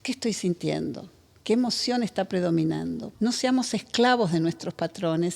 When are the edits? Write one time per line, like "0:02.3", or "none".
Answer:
0:03.0